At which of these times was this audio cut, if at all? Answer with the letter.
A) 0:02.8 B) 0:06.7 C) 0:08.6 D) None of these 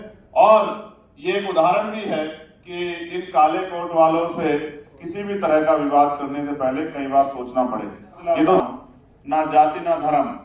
C